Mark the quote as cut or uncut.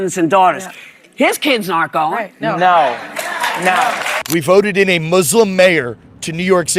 cut